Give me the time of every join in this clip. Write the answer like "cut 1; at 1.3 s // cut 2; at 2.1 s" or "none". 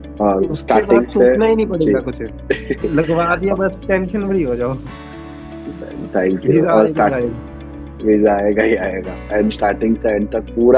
none